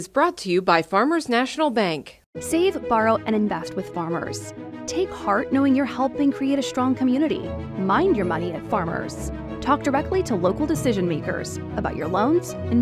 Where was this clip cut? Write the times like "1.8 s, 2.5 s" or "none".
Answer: none